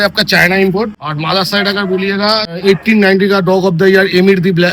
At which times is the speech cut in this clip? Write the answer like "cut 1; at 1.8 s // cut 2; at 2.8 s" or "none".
cut 1; at 1.0 s // cut 2; at 2.5 s